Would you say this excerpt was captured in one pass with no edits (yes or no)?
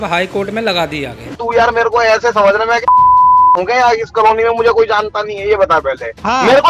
yes